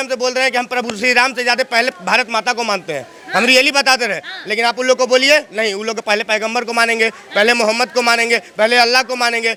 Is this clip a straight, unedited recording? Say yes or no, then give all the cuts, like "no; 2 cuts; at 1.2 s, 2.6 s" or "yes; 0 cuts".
yes; 0 cuts